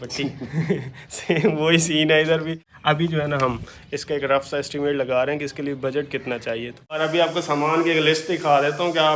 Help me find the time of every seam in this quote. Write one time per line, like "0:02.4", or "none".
0:02.7
0:07.0